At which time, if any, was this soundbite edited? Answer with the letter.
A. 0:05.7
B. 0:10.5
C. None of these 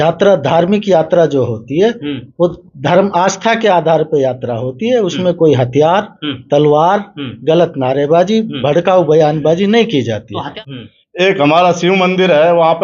B